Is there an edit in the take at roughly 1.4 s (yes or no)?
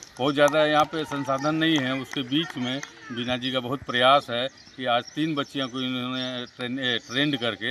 no